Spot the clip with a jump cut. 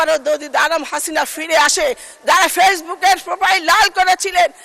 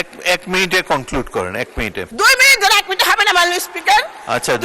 second; 1 cut; at 2.1 s

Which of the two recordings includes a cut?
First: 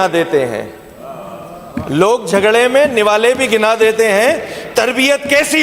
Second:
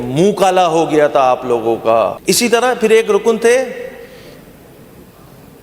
second; 1 cut; at 2.2 s

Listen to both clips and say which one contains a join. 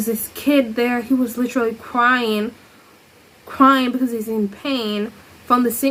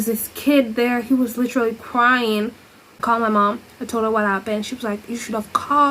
second; 1 cut; at 2.9 s

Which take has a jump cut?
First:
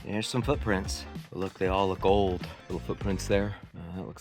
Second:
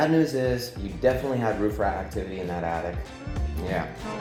first; 1 cut; at 1.0 s

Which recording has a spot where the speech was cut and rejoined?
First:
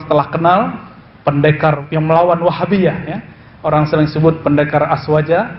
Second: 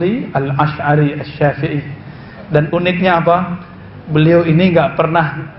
first; 1 cut; at 1.8 s

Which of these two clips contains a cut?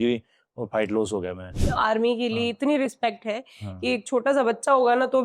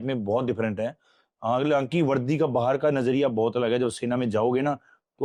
first; 1 cut; at 1.6 s

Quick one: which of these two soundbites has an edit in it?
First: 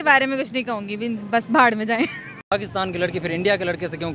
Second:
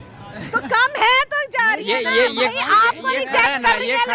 first; 1 cut; at 2.4 s

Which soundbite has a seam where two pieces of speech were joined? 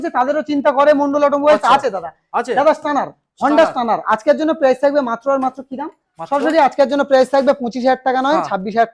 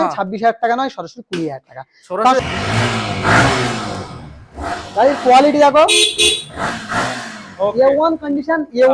second; 1 cut; at 2.4 s

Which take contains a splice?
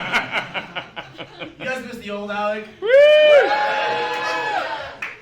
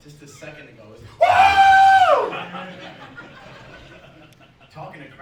first; 1 cut; at 4.2 s

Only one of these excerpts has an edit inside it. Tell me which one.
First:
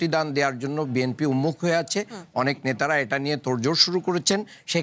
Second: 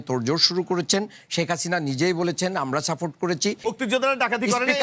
second; 1 cut; at 3.6 s

